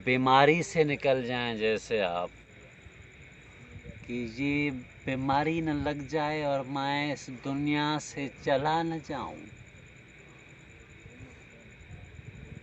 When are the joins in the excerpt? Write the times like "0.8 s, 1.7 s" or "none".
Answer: 2.5 s